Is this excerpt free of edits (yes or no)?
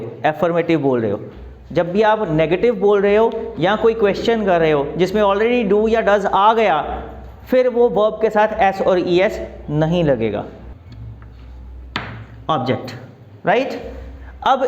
yes